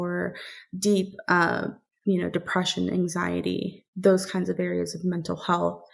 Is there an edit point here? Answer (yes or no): no